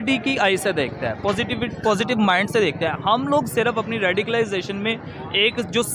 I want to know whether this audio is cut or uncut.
uncut